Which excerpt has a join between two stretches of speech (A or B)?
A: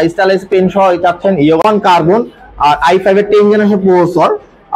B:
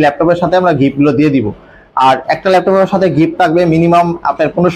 A